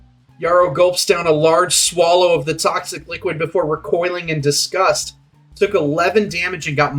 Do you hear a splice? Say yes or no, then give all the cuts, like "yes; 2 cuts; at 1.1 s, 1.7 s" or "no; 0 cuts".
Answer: no; 0 cuts